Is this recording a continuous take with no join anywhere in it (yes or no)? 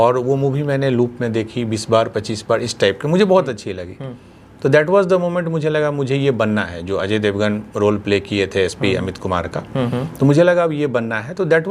yes